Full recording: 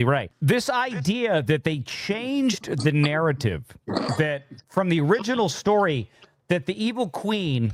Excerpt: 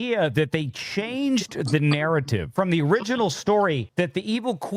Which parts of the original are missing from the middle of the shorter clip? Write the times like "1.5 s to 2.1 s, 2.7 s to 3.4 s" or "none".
3.6 s to 4.7 s, 6.0 s to 6.4 s